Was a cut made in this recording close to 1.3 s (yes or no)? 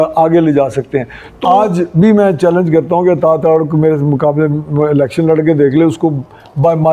yes